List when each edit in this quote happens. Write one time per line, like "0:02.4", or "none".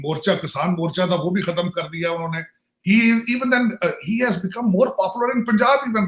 none